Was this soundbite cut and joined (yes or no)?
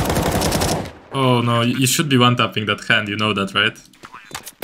no